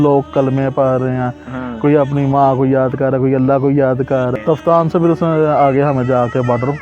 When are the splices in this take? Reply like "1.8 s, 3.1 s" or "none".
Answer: 4.3 s